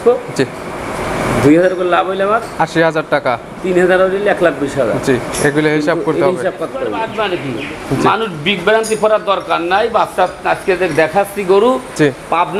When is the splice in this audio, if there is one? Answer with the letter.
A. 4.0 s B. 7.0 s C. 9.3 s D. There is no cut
B